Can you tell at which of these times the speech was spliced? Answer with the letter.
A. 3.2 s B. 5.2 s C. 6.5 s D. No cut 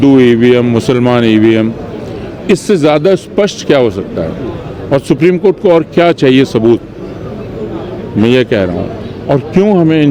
D